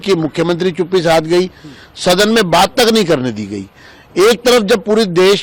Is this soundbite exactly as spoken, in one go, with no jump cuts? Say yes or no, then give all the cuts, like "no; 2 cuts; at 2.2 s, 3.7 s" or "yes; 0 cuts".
yes; 0 cuts